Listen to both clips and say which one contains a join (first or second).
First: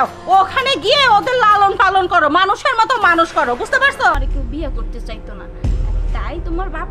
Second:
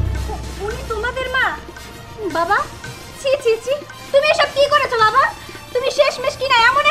first